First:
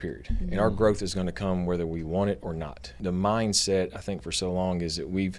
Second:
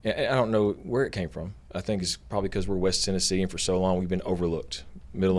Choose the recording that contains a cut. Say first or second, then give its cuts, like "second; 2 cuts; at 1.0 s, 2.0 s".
first; 1 cut; at 2.9 s